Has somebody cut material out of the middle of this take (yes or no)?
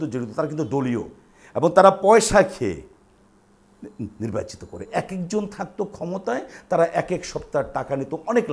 yes